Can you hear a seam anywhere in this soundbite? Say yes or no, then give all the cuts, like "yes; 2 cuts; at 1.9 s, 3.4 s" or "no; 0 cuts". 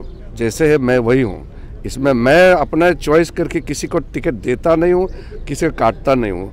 no; 0 cuts